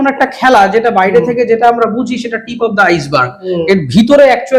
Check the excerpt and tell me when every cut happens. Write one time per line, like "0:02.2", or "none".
none